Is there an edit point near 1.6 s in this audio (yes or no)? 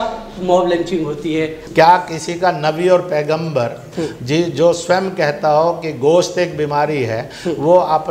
yes